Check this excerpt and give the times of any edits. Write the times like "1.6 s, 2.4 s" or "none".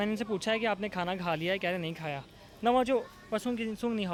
none